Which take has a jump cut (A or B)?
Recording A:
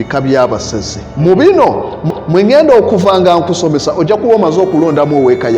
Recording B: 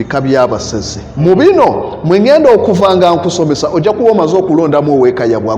B